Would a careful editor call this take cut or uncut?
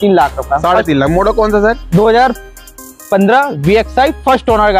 uncut